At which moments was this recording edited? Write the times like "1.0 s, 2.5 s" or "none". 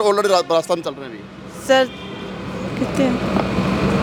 none